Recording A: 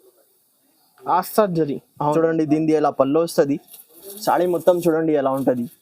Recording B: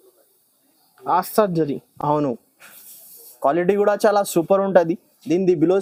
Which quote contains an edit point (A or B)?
A